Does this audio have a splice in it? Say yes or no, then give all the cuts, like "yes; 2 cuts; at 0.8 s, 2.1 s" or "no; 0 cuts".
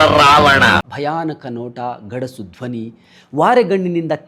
yes; 1 cut; at 0.9 s